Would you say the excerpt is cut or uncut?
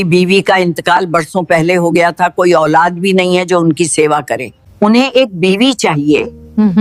uncut